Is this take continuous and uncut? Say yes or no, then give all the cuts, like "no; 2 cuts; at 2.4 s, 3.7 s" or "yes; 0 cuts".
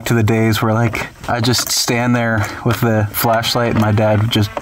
no; 2 cuts; at 1.1 s, 3.1 s